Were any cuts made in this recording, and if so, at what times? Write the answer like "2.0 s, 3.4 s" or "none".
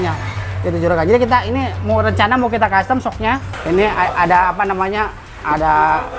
3.5 s